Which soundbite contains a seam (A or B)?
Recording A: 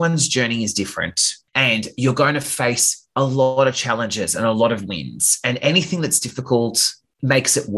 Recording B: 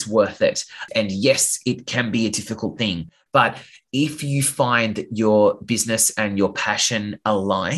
A